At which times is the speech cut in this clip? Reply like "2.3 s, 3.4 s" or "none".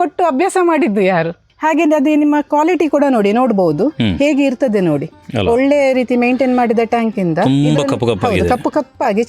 1.4 s